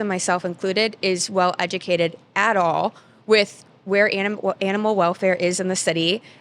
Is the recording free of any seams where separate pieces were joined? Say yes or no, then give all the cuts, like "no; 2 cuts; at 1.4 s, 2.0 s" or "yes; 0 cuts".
yes; 0 cuts